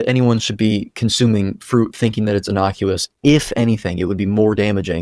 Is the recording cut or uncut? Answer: uncut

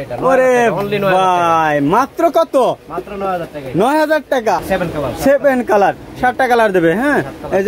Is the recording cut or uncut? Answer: cut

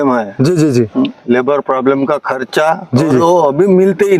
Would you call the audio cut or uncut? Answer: uncut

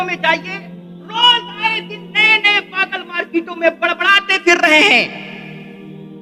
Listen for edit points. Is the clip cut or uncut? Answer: uncut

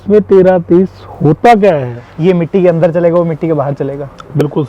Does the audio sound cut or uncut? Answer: cut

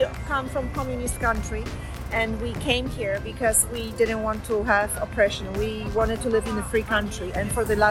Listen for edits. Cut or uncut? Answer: uncut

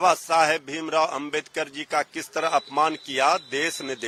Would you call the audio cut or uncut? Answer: uncut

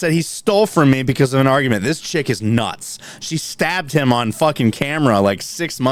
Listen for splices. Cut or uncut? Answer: uncut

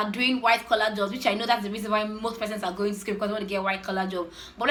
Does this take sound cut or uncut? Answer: uncut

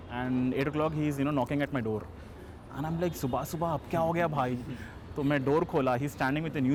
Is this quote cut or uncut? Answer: uncut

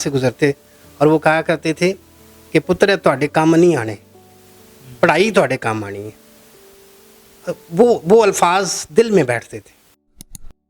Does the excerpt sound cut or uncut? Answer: cut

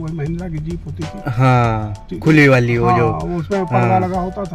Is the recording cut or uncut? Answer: uncut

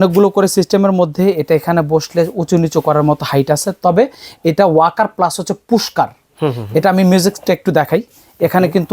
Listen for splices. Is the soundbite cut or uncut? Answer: uncut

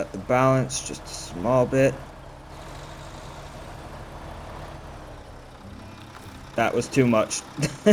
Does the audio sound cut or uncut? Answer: uncut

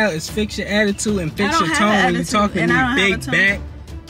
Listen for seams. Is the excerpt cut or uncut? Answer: uncut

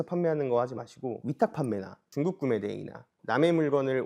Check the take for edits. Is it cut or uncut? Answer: cut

